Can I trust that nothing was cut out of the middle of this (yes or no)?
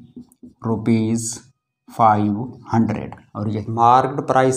no